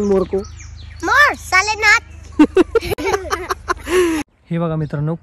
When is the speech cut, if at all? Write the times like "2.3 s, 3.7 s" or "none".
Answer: 4.3 s